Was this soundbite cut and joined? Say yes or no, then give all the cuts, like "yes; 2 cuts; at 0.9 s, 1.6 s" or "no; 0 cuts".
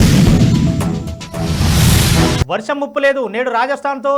yes; 1 cut; at 2.4 s